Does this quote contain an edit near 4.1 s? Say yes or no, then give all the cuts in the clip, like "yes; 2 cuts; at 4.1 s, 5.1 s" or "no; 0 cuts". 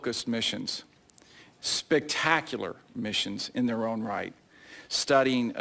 no; 0 cuts